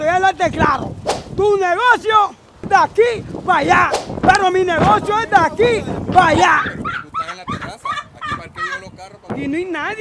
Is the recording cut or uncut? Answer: uncut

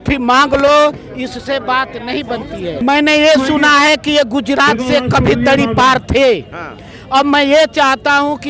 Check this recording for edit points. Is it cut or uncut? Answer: cut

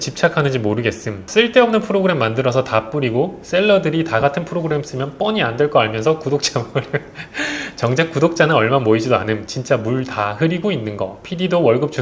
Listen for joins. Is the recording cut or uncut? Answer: uncut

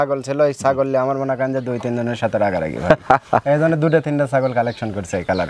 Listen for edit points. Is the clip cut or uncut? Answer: uncut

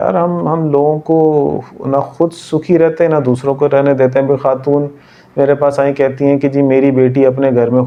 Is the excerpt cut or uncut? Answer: uncut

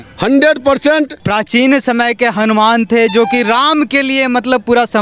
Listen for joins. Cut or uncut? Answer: cut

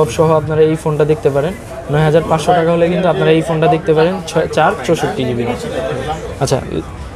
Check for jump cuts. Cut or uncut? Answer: uncut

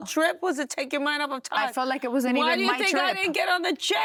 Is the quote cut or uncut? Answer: uncut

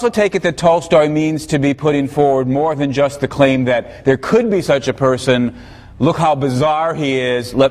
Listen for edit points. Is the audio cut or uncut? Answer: cut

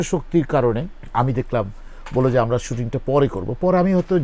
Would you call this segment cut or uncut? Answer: cut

